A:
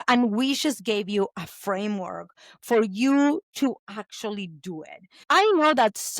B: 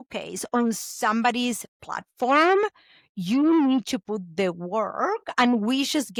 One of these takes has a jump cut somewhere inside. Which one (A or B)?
A